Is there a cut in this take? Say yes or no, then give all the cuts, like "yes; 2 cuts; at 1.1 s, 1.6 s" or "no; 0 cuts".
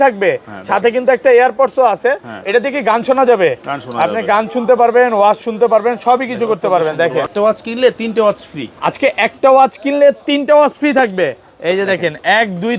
yes; 1 cut; at 7.3 s